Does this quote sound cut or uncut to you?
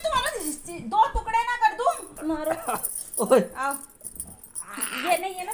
cut